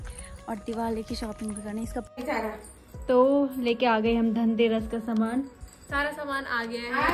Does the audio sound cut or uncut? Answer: cut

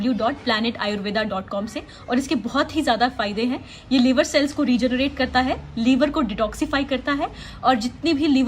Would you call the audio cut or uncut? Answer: uncut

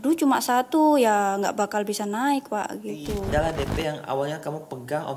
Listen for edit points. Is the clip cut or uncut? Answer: cut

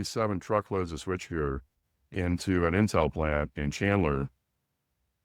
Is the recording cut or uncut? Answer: uncut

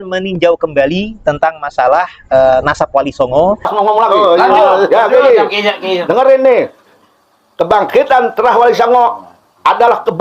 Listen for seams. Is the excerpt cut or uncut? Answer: cut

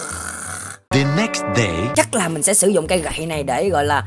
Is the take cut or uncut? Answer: cut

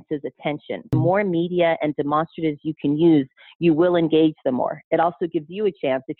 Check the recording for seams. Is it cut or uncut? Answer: cut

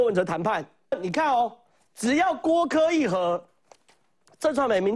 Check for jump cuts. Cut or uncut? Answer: cut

